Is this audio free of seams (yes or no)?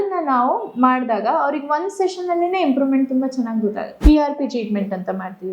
no